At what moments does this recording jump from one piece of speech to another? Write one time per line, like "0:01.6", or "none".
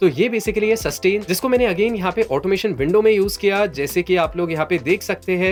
none